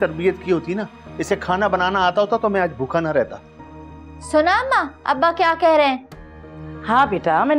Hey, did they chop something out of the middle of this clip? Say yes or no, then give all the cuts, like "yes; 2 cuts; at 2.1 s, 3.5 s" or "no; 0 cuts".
no; 0 cuts